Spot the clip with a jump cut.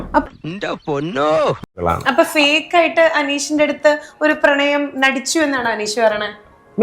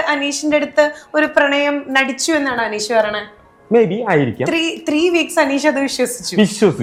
first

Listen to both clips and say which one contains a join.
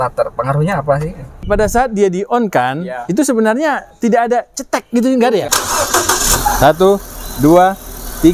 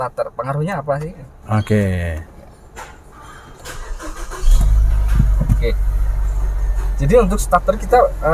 first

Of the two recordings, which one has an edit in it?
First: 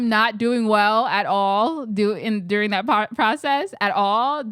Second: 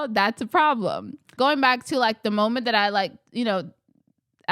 second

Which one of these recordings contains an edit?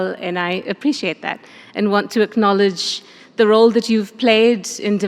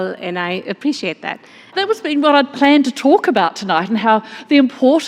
second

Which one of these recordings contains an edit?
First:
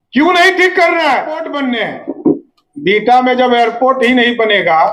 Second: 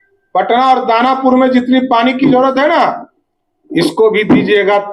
first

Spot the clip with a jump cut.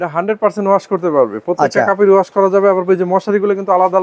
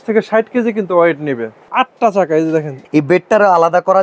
second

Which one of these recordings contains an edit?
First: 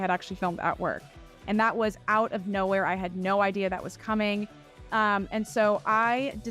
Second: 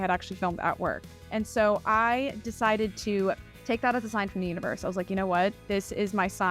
second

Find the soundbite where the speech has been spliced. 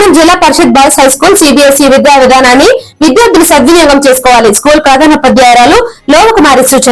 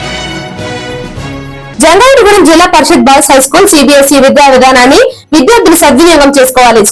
second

